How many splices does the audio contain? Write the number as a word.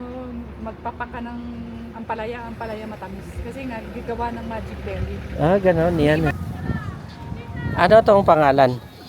one